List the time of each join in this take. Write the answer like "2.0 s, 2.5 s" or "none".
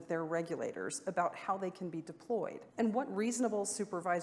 2.6 s